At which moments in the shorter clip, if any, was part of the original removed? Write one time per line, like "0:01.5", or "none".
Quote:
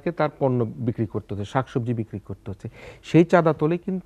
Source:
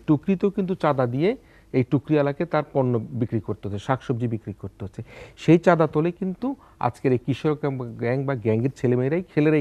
none